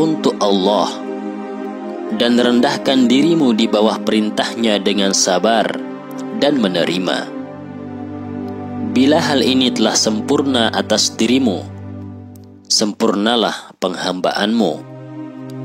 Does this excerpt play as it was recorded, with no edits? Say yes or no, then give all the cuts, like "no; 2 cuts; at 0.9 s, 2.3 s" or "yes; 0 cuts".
no; 2 cuts; at 7.2 s, 8.9 s